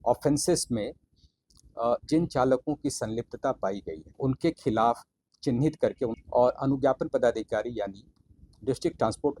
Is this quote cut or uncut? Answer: cut